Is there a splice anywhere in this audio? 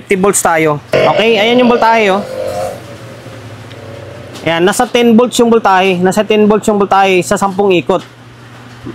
yes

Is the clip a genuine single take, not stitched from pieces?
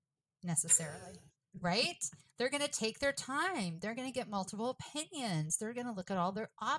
yes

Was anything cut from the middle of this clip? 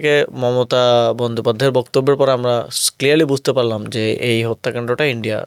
no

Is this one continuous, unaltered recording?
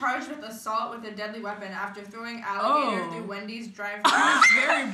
yes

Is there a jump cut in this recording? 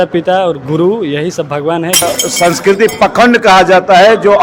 yes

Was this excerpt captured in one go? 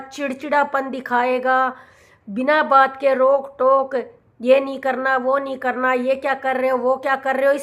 yes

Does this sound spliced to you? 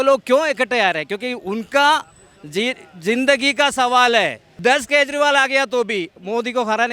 yes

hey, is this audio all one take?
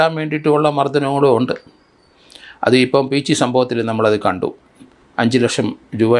yes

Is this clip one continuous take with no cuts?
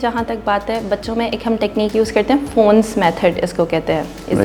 yes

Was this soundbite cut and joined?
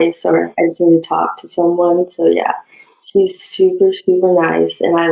no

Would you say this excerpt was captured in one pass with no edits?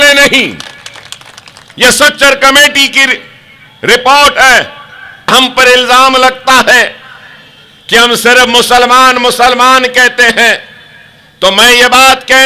no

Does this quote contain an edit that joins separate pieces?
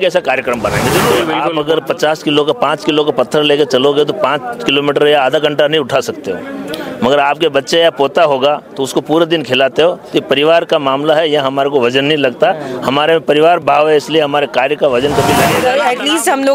yes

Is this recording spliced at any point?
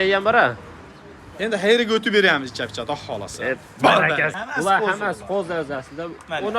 yes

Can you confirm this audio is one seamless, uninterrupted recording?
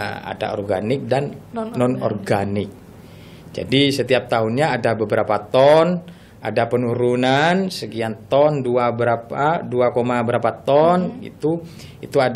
yes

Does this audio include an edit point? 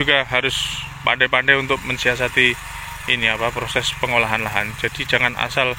no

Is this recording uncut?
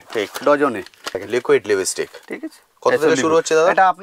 no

